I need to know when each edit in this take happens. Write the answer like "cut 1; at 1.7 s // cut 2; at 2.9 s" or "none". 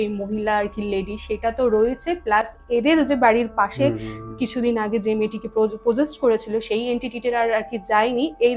none